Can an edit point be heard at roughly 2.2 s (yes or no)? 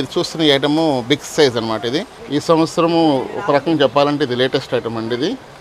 yes